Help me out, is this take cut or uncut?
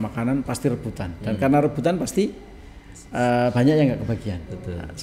uncut